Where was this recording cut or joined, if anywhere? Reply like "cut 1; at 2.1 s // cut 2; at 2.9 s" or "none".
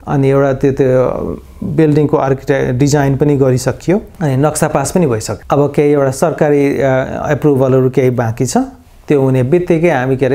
none